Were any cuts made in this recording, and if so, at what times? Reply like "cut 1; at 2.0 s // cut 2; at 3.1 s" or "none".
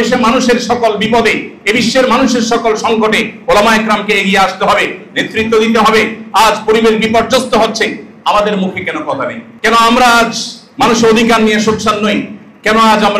cut 1; at 9.5 s

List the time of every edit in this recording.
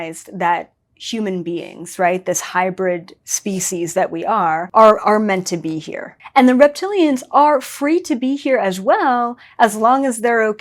cut 1; at 4.7 s // cut 2; at 6.2 s

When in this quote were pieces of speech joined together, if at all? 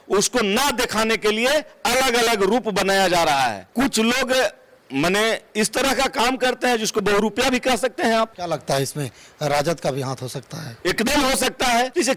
none

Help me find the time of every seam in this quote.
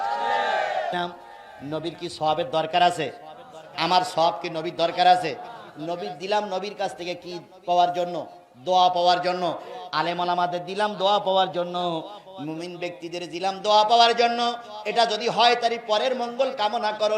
cut 1; at 0.9 s

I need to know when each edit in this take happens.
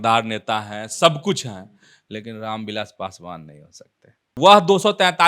cut 1; at 4.3 s

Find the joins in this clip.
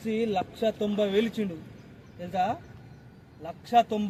none

